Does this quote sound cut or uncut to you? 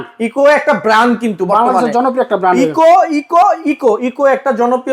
uncut